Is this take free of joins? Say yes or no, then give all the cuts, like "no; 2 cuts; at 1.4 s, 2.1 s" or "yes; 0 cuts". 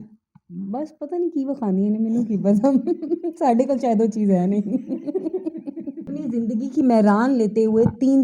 no; 1 cut; at 6.1 s